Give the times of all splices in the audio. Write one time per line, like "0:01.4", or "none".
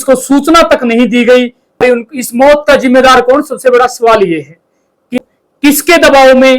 0:01.8
0:05.2